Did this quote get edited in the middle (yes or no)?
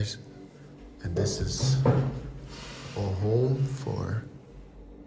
no